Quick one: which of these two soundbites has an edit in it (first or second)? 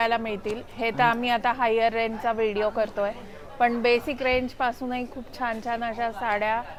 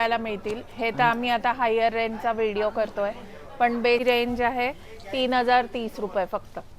second